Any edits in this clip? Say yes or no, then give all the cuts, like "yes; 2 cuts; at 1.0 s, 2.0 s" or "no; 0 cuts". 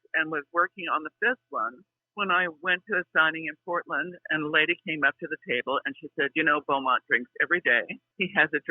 no; 0 cuts